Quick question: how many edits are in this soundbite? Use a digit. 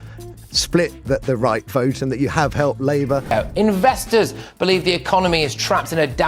1